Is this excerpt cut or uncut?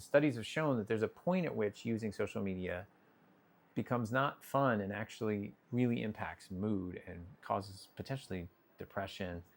uncut